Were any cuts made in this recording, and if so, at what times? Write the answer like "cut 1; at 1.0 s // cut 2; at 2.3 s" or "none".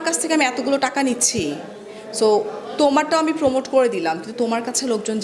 none